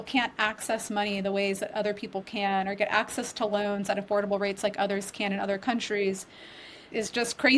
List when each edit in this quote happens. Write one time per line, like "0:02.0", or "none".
none